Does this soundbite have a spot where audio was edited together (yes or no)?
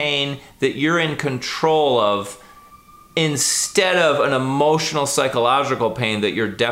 no